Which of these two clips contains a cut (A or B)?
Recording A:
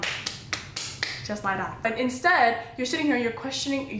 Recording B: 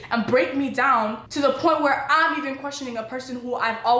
A